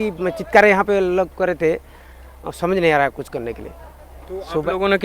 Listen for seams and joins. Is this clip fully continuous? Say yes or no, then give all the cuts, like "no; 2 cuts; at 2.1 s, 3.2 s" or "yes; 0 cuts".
yes; 0 cuts